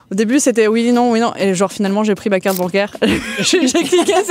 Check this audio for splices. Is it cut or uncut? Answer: uncut